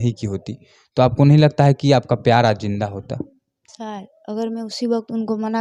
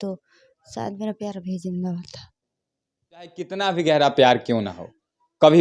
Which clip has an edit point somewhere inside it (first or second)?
second